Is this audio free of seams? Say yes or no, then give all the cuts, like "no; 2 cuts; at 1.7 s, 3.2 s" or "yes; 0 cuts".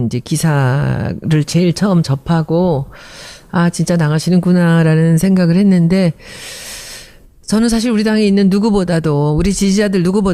no; 1 cut; at 3.5 s